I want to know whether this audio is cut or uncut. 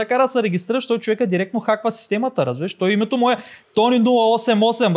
uncut